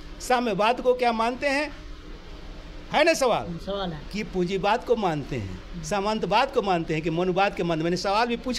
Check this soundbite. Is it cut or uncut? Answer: uncut